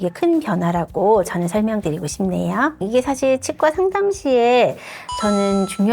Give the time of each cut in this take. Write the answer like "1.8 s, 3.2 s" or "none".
2.8 s